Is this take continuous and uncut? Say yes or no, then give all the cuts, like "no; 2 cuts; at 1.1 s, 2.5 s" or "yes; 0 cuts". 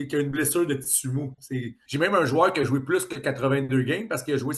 no; 1 cut; at 1.8 s